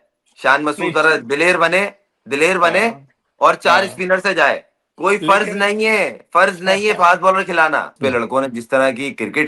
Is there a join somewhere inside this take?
yes; 1 cut; at 8.0 s

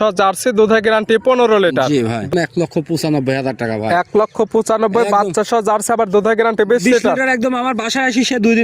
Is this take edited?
yes; 1 cut; at 2.3 s

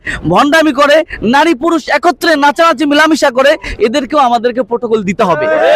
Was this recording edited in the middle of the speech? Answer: no; 0 cuts

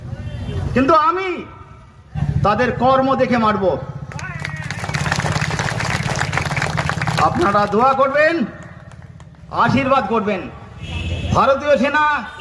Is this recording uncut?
no; 1 cut; at 2.2 s

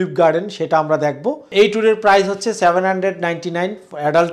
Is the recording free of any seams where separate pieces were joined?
no; 1 cut; at 1.4 s

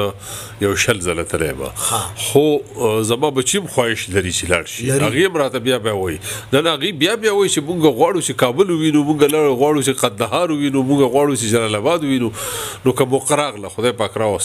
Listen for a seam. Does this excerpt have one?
no; 0 cuts

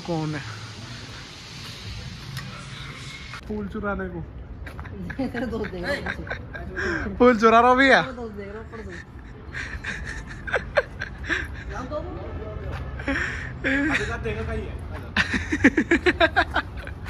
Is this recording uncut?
no; 1 cut; at 3.4 s

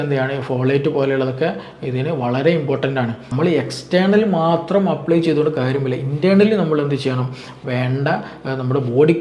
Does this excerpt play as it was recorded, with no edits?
no; 1 cut; at 3.2 s

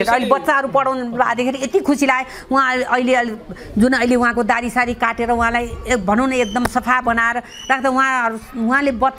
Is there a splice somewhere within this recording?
no; 0 cuts

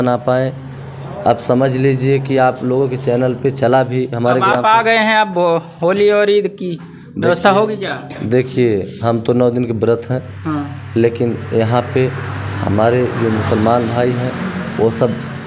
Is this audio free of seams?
yes; 0 cuts

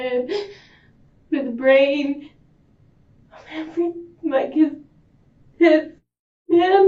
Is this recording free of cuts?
yes; 0 cuts

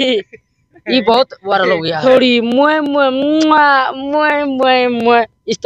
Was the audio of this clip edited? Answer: yes; 1 cut; at 1.9 s

